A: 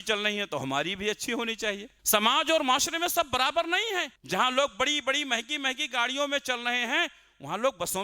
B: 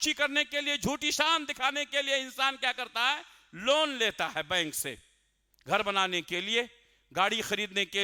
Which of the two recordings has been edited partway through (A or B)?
A